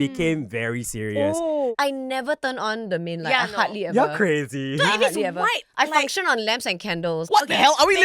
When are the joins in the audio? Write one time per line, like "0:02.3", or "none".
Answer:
0:01.7
0:07.2